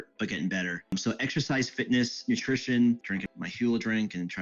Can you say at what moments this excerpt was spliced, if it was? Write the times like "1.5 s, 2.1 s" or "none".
3.1 s